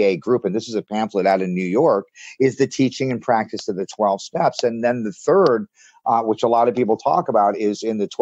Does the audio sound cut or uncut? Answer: uncut